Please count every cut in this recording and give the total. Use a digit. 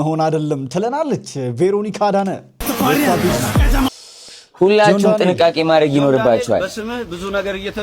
1